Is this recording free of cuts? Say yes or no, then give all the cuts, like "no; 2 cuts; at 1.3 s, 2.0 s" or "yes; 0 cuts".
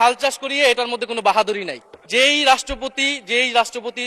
no; 1 cut; at 2.1 s